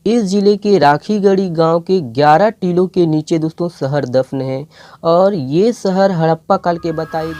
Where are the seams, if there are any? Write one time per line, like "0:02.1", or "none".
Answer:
none